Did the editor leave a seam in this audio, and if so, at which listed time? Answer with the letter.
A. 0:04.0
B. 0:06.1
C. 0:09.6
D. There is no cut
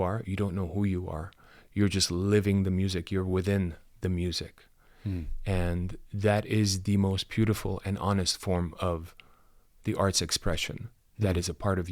D